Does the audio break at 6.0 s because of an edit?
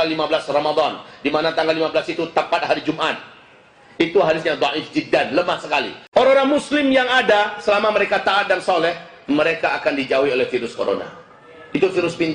yes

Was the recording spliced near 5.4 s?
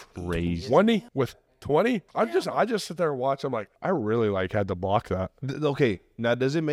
yes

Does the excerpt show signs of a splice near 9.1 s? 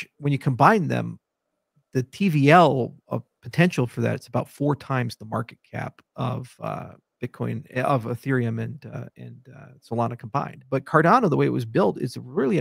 no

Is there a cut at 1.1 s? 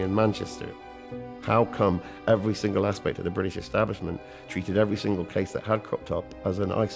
yes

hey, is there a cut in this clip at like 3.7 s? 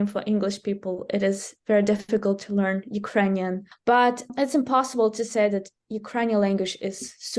yes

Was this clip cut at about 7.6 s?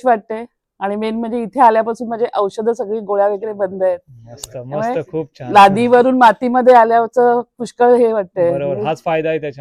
no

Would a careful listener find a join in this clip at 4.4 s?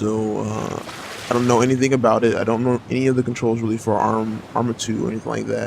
yes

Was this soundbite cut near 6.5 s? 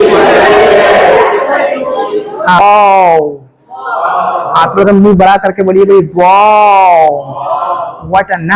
no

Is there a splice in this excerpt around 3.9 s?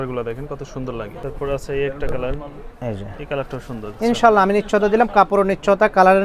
yes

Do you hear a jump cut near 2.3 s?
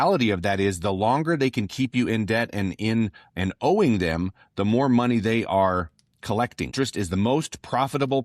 no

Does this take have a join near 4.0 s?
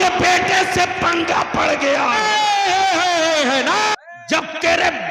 yes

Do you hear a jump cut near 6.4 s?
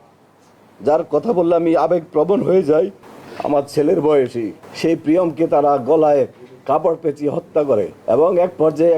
no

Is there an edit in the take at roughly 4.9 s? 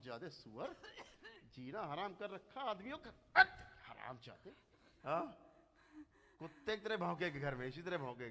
yes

